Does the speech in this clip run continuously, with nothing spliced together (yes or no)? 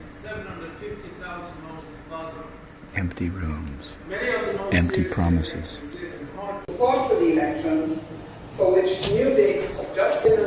no